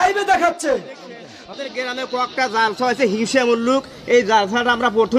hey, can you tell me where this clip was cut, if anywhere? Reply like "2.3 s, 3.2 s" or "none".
1.4 s